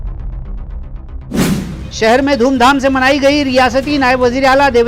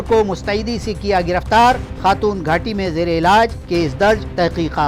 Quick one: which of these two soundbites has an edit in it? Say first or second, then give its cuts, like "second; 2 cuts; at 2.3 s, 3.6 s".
first; 1 cut; at 1.7 s